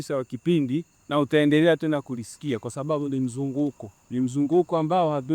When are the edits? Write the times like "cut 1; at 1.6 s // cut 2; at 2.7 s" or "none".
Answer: cut 1; at 1.0 s // cut 2; at 3.9 s